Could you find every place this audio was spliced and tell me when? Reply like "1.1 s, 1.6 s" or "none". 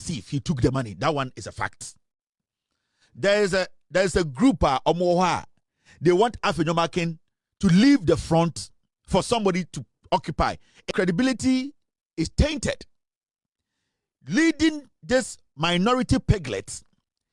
10.9 s